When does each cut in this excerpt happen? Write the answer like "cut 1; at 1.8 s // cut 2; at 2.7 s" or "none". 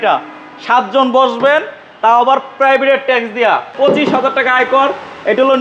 cut 1; at 3.7 s